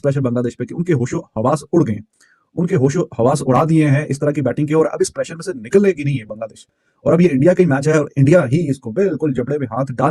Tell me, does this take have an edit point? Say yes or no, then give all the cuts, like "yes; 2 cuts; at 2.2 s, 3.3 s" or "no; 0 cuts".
no; 0 cuts